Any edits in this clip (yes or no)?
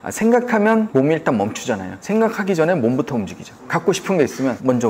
no